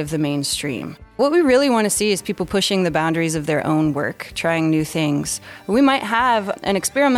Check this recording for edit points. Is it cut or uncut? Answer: cut